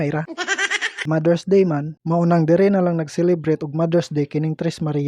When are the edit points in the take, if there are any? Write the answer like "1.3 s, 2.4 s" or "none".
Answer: 1.0 s